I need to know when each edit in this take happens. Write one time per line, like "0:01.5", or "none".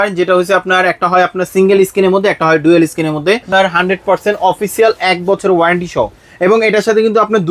0:03.5